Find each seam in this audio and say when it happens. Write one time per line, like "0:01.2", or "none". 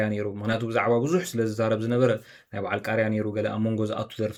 none